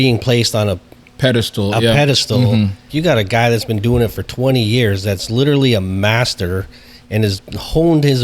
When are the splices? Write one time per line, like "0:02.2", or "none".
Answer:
0:02.9